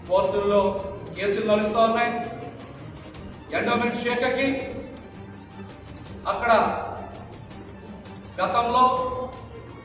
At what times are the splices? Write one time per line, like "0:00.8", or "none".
none